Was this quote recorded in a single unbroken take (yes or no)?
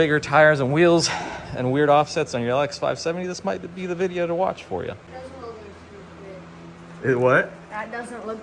yes